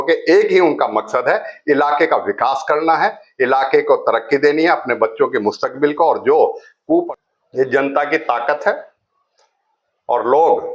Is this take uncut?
no; 1 cut; at 7.1 s

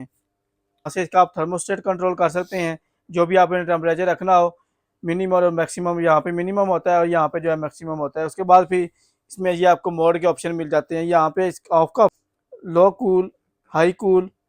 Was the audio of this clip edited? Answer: yes; 2 cuts; at 0.9 s, 12.2 s

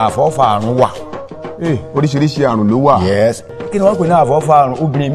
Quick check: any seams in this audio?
no; 0 cuts

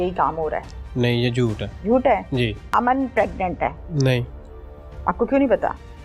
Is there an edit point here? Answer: yes; 3 cuts; at 1.7 s, 2.6 s, 3.8 s

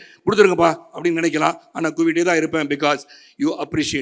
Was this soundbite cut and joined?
no; 0 cuts

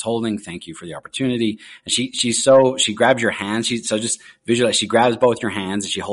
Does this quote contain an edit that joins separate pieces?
no; 0 cuts

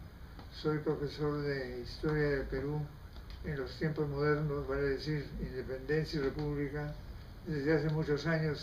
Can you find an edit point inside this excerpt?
yes; 1 cut; at 4.0 s

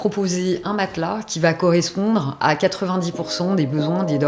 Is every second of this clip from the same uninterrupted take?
yes; 0 cuts

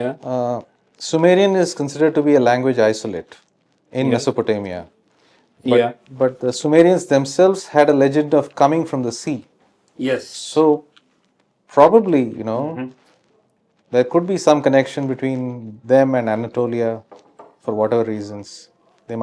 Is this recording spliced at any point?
no; 0 cuts

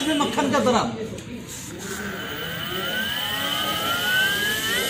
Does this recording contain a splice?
no; 0 cuts

